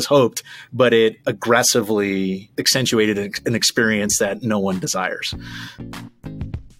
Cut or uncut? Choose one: cut